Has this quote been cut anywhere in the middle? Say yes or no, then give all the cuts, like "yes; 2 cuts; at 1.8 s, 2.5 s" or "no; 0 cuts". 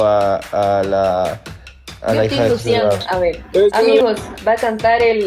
yes; 1 cut; at 4.0 s